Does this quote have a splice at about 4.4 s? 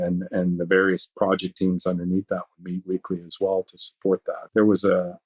yes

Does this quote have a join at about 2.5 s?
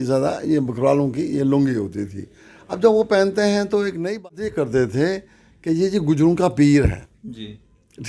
no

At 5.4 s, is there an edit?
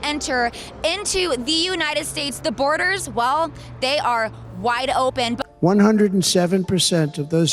yes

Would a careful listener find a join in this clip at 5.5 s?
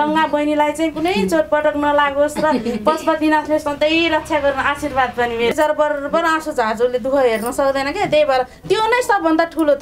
yes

